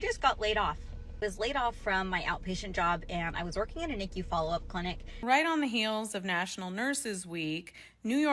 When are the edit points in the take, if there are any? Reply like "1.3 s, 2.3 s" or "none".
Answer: 5.2 s